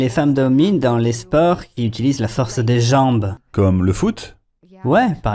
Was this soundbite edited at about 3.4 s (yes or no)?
yes